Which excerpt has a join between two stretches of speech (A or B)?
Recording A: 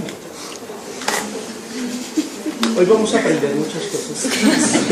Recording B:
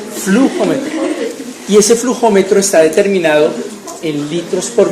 B